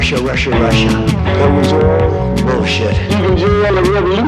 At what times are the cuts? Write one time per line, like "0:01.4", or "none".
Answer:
none